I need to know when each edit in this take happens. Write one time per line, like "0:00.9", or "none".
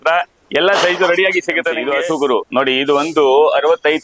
0:01.8